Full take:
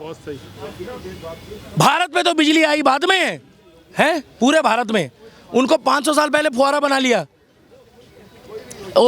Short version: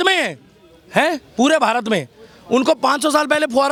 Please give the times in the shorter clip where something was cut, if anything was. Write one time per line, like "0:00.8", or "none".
none